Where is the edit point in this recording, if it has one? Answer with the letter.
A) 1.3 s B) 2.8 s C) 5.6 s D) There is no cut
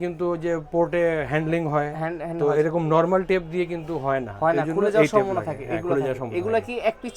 D